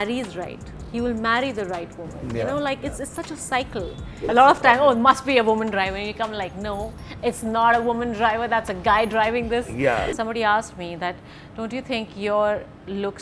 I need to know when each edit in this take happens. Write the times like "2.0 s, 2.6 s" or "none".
4.3 s, 10.1 s